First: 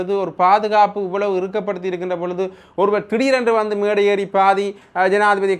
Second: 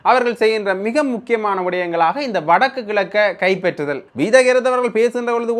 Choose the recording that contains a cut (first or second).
second